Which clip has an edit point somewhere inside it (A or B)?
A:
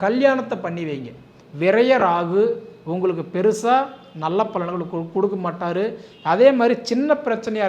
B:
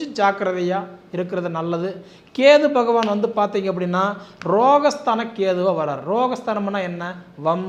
A